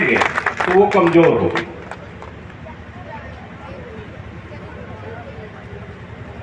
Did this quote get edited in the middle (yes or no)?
no